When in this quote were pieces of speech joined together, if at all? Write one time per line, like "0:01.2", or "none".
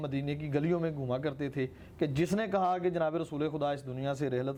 none